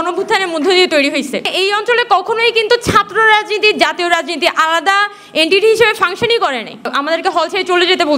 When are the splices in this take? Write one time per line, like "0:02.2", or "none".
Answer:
0:01.5
0:06.9

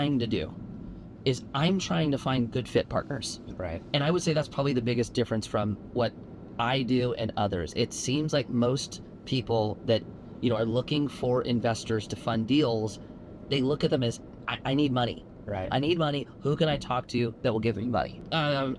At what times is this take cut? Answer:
none

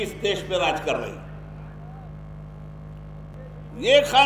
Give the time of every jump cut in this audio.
0:03.3

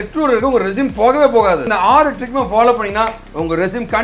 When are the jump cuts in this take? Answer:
0:01.7

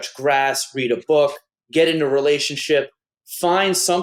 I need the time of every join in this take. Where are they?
none

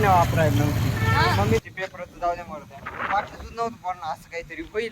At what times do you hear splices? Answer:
0:01.7

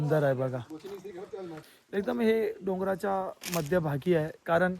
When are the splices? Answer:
0:01.6

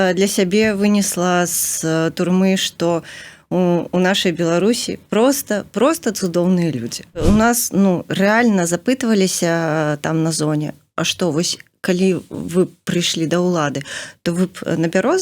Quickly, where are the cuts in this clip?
0:07.2

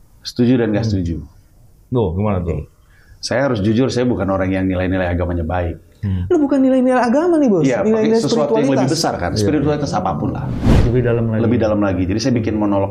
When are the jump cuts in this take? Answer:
0:10.7

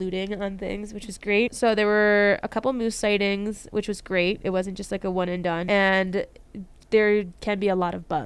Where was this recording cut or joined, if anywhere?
0:01.5
0:05.6

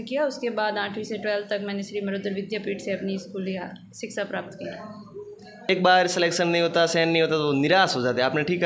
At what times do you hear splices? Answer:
0:05.7

